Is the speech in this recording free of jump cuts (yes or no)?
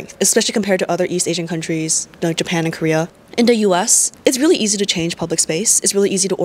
no